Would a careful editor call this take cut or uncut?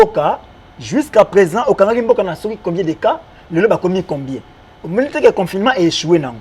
uncut